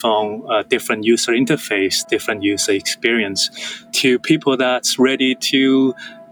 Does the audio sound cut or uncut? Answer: uncut